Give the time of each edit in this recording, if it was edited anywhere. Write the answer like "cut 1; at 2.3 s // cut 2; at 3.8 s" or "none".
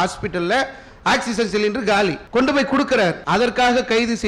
cut 1; at 2.2 s // cut 2; at 3.2 s